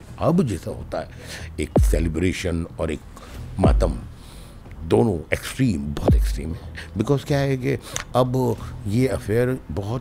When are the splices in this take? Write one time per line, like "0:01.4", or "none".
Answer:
none